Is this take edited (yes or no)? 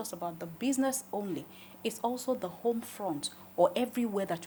no